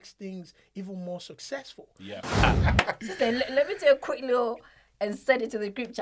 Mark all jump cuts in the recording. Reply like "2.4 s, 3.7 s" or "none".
2.4 s